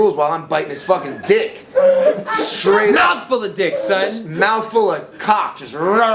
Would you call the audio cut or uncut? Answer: uncut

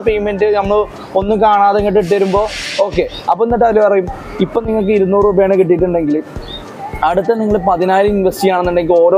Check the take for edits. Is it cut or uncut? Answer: uncut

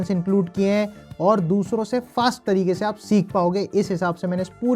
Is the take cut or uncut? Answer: cut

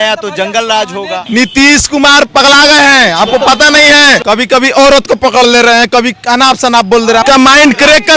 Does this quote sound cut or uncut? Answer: cut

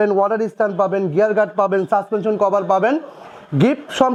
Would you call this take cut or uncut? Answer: uncut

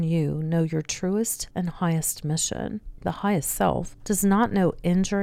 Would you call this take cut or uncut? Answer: cut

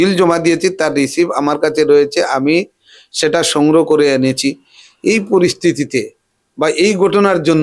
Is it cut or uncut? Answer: uncut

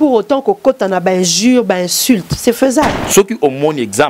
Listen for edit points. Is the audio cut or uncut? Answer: cut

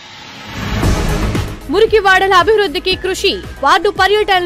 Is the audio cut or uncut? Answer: uncut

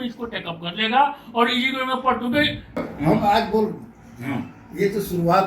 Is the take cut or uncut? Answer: cut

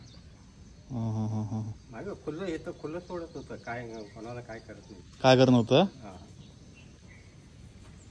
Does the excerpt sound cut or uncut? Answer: uncut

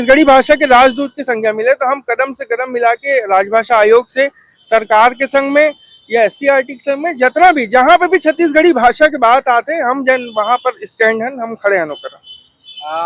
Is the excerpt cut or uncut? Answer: uncut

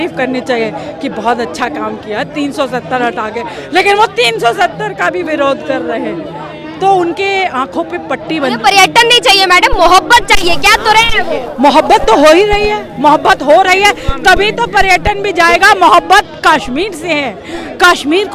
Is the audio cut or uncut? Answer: uncut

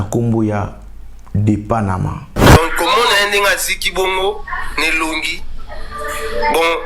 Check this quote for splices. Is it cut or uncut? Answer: cut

